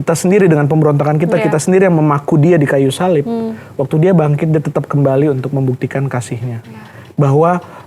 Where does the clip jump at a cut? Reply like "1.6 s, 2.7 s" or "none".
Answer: none